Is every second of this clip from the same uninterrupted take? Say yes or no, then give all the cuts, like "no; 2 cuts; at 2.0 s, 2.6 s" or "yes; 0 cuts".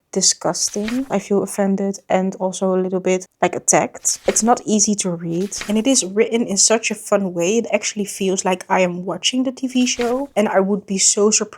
no; 4 cuts; at 1.1 s, 4.2 s, 5.6 s, 10.3 s